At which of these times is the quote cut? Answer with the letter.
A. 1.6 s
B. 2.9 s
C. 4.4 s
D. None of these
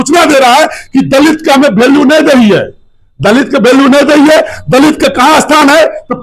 D